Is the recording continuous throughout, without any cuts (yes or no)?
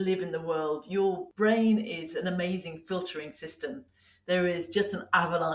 no